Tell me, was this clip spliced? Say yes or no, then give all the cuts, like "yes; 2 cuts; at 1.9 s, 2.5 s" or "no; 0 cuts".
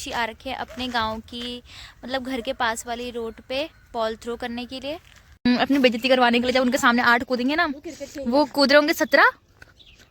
yes; 1 cut; at 5.5 s